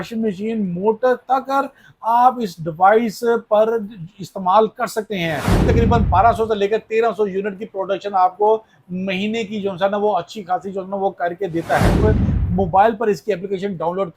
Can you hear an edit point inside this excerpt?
yes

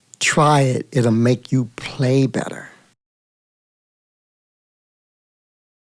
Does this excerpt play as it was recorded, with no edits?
yes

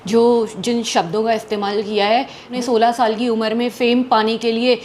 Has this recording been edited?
yes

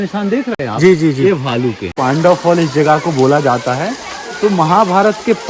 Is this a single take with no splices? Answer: no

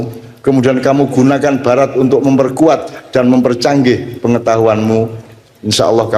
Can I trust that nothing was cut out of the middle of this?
yes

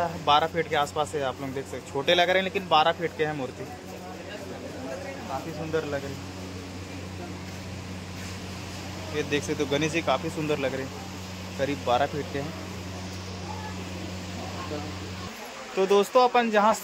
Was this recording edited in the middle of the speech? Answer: yes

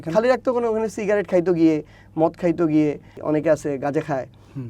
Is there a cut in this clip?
yes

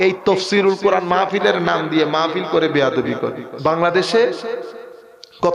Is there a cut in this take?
yes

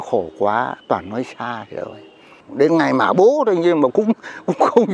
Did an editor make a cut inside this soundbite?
yes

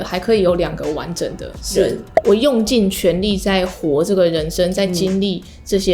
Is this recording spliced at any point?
yes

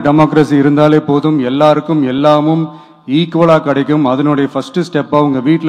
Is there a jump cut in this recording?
no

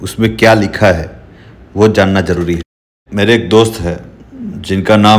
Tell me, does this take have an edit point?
yes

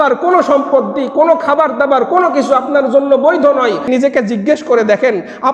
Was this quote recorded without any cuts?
no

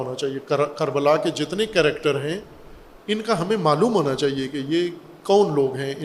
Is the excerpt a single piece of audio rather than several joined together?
yes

